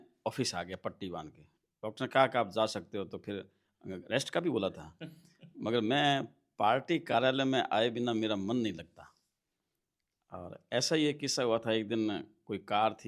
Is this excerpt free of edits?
yes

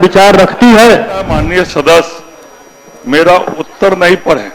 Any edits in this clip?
yes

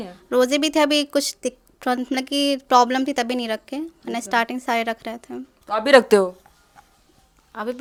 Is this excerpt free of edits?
yes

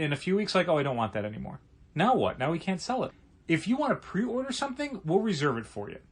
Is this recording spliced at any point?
yes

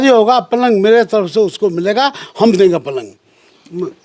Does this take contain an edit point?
no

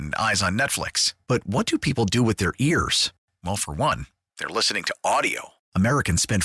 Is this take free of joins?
yes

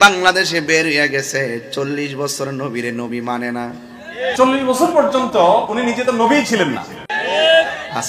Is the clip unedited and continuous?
yes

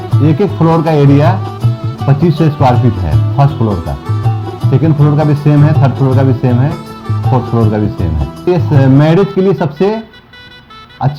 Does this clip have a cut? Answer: no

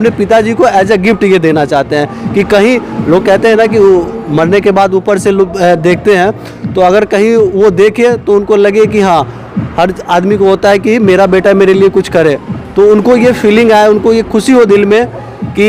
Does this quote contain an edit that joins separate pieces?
no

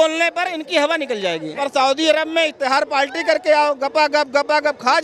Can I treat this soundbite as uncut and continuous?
no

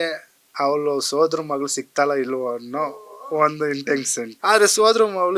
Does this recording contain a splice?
yes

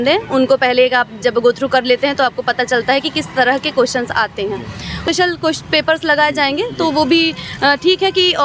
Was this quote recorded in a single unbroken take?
no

